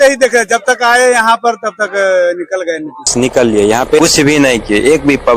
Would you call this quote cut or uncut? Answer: cut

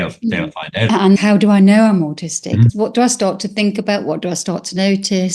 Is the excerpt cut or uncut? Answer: cut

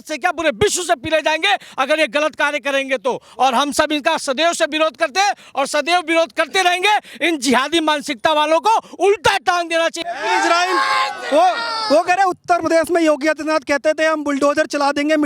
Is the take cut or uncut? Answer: uncut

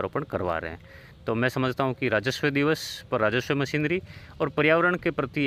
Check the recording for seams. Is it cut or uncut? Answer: uncut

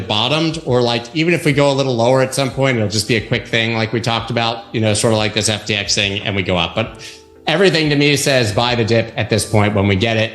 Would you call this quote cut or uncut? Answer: uncut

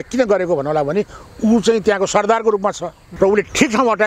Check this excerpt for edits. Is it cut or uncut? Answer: cut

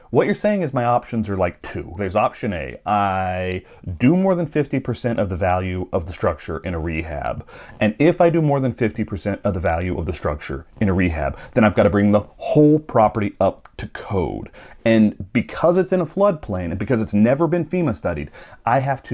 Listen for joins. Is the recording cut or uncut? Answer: cut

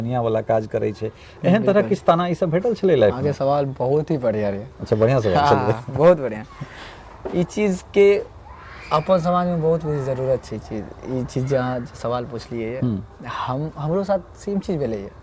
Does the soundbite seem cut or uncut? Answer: uncut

